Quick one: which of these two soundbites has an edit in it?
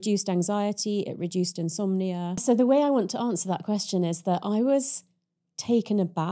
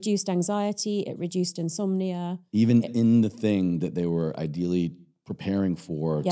first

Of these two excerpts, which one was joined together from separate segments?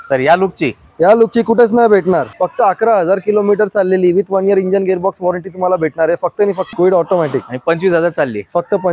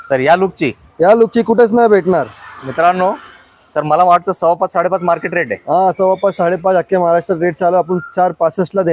first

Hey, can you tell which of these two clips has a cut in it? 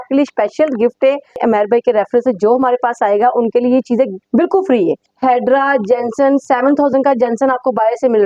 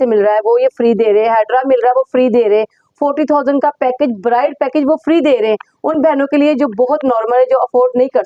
first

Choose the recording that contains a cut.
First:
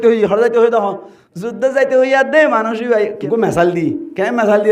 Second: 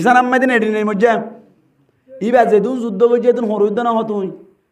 first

